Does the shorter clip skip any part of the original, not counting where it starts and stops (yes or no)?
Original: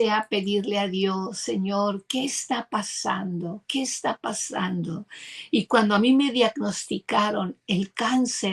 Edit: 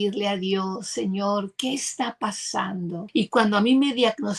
yes